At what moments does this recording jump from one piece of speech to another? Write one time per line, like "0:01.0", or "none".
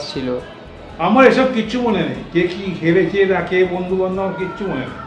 none